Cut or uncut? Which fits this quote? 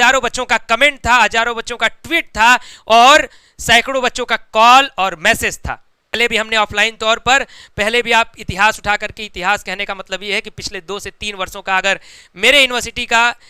cut